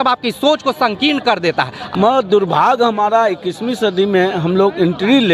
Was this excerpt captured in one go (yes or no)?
no